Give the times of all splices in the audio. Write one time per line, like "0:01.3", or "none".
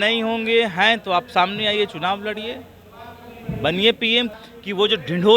0:04.4